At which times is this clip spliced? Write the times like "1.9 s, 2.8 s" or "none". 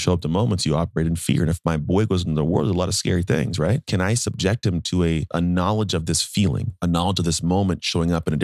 3.8 s, 5.3 s

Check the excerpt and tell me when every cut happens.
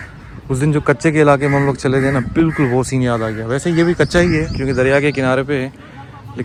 none

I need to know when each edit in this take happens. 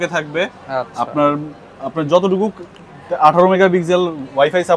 none

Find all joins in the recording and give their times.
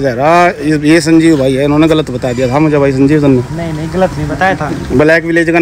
none

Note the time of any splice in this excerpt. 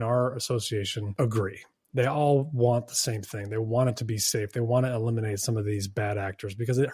1.0 s

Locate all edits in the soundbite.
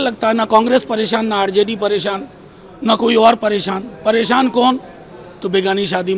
none

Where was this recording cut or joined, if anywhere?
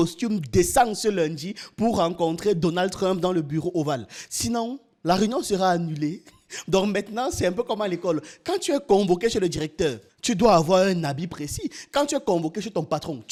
none

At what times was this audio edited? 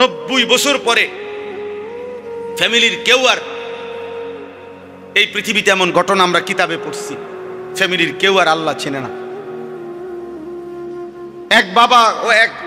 none

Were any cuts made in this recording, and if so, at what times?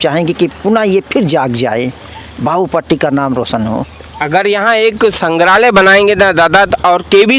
none

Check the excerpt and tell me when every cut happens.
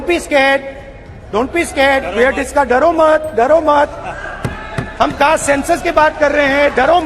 none

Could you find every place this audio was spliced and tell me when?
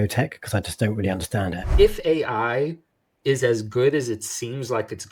1.7 s

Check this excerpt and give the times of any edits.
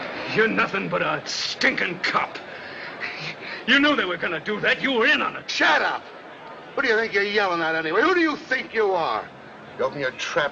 1.2 s

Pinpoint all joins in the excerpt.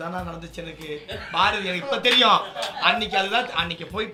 none

